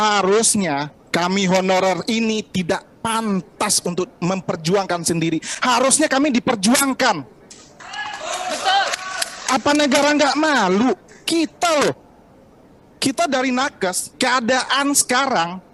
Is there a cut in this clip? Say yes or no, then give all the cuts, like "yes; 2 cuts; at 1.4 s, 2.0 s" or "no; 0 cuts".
no; 0 cuts